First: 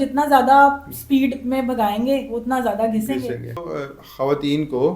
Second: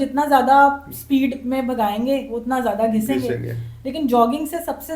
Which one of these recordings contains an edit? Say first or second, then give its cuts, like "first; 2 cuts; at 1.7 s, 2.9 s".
first; 1 cut; at 3.7 s